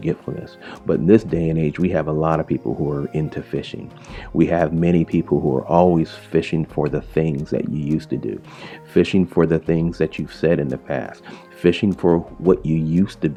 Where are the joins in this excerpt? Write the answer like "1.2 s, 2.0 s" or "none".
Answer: none